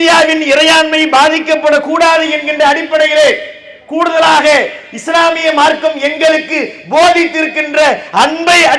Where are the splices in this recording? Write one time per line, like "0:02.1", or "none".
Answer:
none